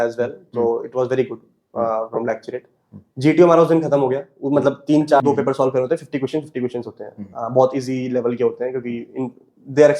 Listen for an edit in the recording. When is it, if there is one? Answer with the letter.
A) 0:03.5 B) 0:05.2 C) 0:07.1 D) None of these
B